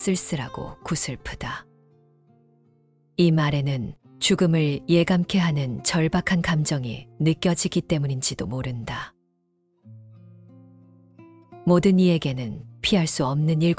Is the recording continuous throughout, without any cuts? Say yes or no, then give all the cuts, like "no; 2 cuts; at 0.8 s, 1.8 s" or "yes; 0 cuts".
yes; 0 cuts